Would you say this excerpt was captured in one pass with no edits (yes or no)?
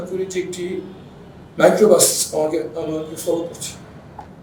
yes